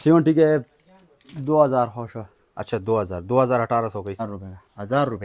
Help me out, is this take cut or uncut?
cut